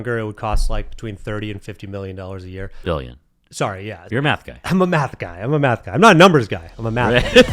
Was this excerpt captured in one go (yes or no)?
no